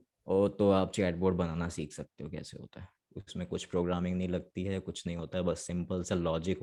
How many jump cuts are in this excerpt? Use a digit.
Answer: 0